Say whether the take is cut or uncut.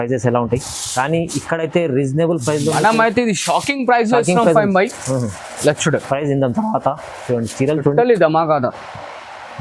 uncut